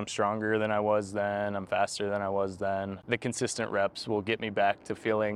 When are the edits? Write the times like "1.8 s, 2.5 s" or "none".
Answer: 3.0 s